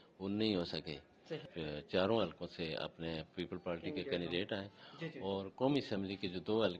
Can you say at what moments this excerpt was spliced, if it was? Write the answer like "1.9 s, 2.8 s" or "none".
1.5 s